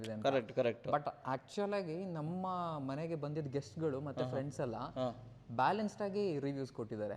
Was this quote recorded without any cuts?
yes; 0 cuts

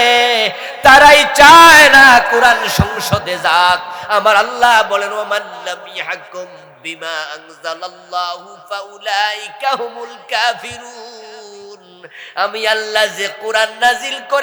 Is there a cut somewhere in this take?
no; 0 cuts

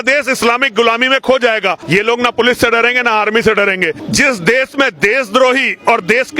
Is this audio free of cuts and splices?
no; 2 cuts; at 1.8 s, 4.0 s

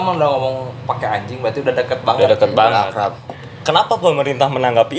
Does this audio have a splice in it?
yes; 1 cut; at 3.3 s

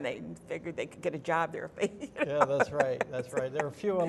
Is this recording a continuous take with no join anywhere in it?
yes; 0 cuts

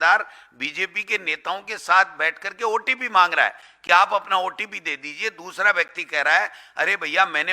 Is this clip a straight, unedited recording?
yes; 0 cuts

